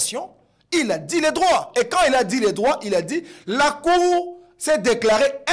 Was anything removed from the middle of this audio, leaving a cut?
no; 0 cuts

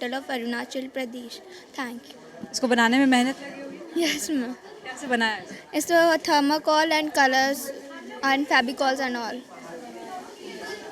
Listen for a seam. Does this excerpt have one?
no; 0 cuts

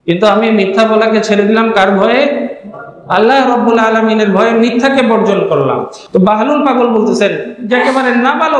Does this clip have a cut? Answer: yes; 1 cut; at 5.9 s

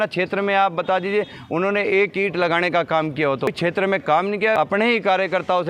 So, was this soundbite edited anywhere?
yes; 2 cuts; at 3.5 s, 4.6 s

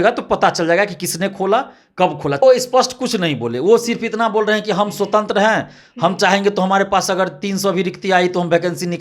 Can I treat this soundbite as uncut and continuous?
no; 1 cut; at 2.4 s

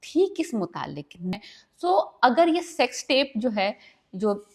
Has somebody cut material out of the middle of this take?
yes; 1 cut; at 1.3 s

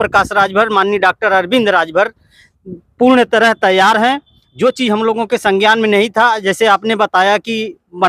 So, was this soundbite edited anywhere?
no; 0 cuts

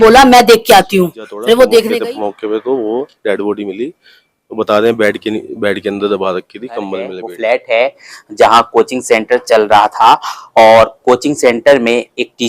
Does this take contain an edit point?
yes; 2 cuts; at 1.9 s, 7.2 s

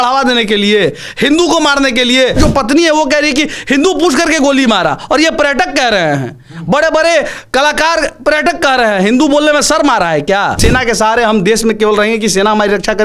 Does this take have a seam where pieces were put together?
yes; 2 cuts; at 2.4 s, 10.6 s

